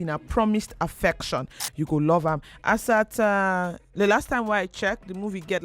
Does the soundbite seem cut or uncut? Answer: cut